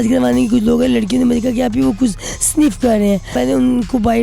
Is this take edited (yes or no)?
yes